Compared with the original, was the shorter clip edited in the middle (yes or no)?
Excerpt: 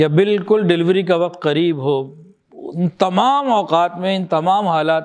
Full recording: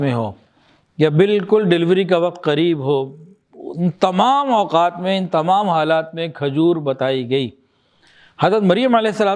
no